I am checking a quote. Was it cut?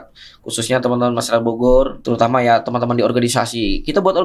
yes; 1 cut; at 2.0 s

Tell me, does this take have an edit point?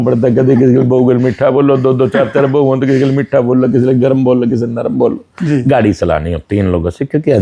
no; 0 cuts

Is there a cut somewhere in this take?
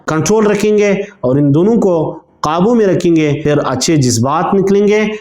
yes; 1 cut; at 3.4 s

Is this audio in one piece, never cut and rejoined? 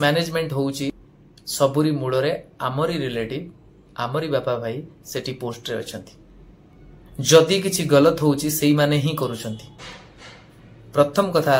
no; 1 cut; at 1.0 s

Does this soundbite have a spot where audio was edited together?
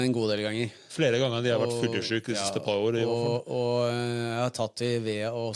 no; 0 cuts

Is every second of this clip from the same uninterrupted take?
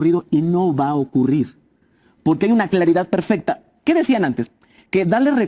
yes; 0 cuts

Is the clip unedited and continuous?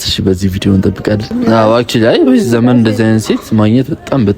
no; 1 cut; at 1.3 s

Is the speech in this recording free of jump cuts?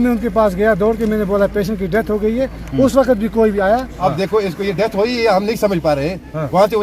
no; 1 cut; at 3.9 s

